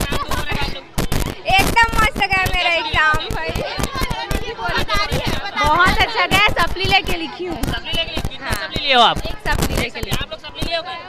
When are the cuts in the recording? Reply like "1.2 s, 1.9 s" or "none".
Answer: none